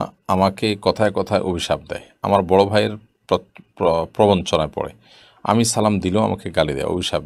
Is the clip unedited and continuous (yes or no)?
yes